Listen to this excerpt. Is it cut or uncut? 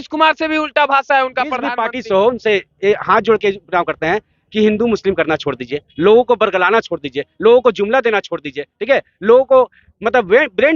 cut